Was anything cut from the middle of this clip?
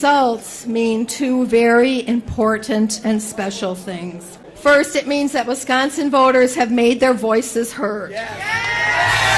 yes; 1 cut; at 4.5 s

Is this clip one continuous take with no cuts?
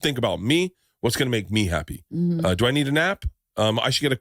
yes; 0 cuts

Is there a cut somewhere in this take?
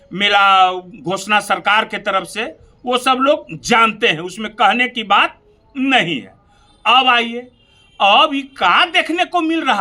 no; 0 cuts

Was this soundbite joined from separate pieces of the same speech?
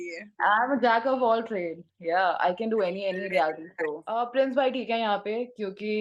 yes; 1 cut; at 4.1 s

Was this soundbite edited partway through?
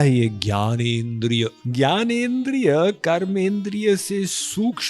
yes; 1 cut; at 1.6 s

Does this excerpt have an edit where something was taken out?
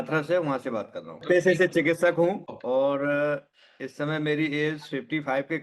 yes; 2 cuts; at 1.2 s, 2.4 s

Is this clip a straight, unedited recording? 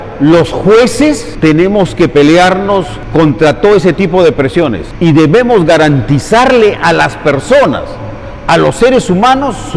no; 3 cuts; at 1.3 s, 3.0 s, 4.8 s

